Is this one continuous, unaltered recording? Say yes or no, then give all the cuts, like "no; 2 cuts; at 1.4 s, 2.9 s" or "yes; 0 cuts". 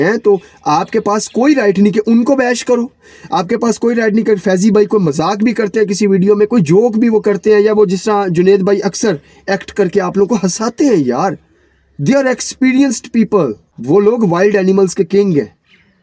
yes; 0 cuts